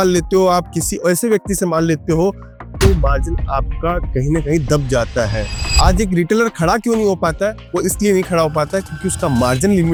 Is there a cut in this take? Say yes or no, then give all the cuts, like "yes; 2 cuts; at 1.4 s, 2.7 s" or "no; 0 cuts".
no; 0 cuts